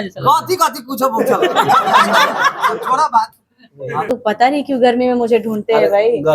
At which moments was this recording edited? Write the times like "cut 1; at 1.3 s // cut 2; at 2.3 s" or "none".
cut 1; at 4.1 s